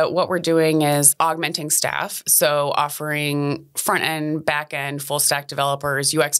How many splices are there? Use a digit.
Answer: 1